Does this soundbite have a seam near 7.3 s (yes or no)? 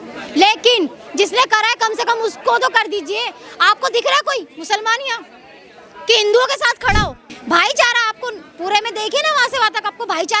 yes